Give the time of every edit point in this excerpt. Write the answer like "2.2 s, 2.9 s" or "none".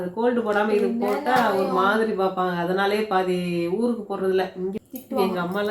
4.8 s